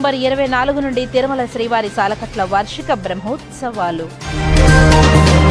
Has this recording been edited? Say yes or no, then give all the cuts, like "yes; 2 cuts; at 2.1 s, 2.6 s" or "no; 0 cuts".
no; 0 cuts